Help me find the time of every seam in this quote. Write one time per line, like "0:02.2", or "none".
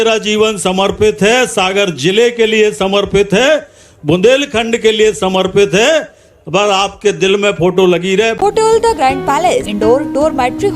0:08.3
0:09.7